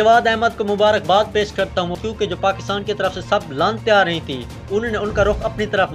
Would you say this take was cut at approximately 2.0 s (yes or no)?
yes